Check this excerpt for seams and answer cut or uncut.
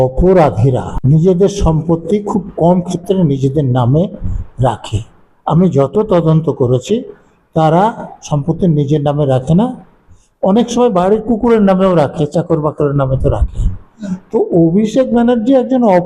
cut